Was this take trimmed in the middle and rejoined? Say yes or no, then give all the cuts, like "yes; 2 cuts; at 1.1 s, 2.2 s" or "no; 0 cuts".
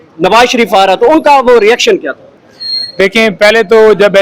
no; 0 cuts